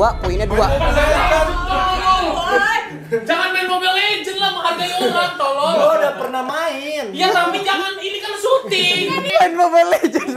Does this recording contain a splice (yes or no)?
yes